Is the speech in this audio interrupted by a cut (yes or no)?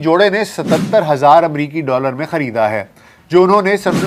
no